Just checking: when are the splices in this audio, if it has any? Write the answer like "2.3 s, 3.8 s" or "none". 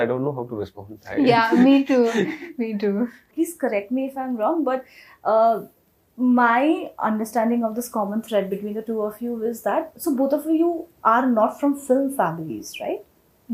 none